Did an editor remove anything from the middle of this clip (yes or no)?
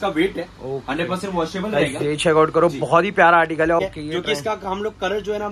yes